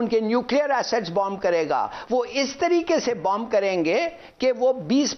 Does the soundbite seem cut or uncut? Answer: uncut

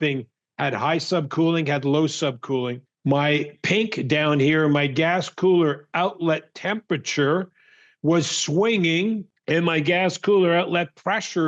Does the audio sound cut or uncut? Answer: uncut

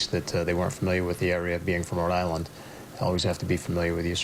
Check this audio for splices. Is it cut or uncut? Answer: uncut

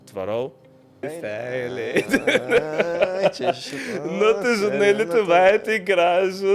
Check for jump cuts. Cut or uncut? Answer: cut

